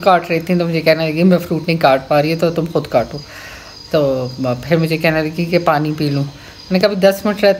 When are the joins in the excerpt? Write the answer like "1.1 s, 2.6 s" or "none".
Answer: none